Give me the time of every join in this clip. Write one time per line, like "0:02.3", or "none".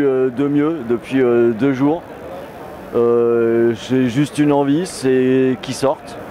none